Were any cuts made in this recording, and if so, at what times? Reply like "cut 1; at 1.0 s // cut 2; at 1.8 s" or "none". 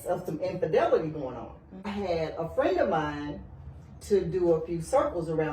cut 1; at 1.9 s